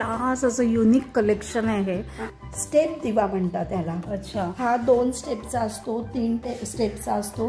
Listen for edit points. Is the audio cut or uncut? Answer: cut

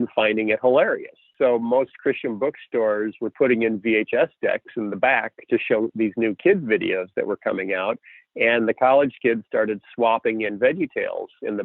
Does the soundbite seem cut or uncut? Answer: cut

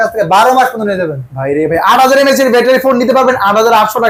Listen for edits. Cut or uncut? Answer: uncut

